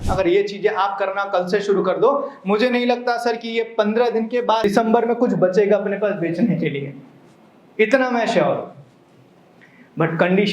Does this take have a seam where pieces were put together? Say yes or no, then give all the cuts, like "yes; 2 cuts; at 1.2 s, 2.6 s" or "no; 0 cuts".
yes; 1 cut; at 4.6 s